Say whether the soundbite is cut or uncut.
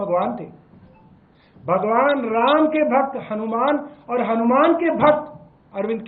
uncut